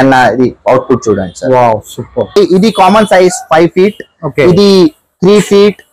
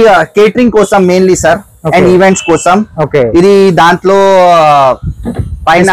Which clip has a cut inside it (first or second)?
first